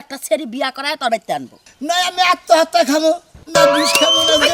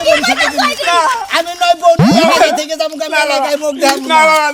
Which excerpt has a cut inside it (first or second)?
first